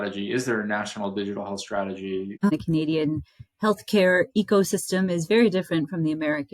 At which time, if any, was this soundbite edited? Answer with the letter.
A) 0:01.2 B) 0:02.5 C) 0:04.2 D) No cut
B